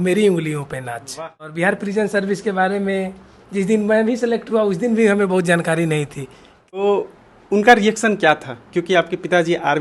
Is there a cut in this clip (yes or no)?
yes